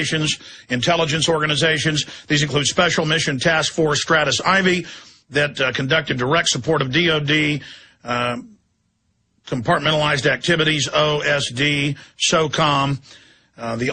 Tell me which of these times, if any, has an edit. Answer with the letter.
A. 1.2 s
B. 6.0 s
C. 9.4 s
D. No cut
B